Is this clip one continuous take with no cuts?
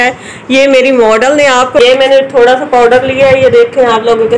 no; 1 cut; at 1.8 s

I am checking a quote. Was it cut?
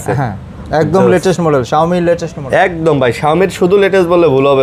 no; 0 cuts

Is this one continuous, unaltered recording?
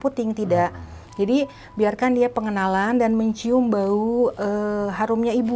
yes; 0 cuts

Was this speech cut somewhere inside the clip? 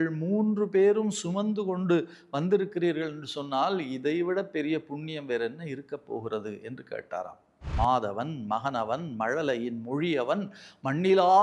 yes; 1 cut; at 7.6 s

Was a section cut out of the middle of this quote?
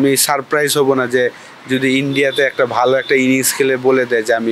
no; 0 cuts

